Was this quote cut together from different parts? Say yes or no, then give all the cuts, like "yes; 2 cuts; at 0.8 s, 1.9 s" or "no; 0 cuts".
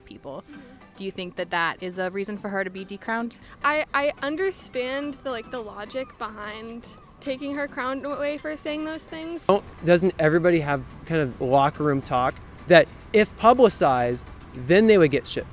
yes; 2 cuts; at 3.5 s, 9.5 s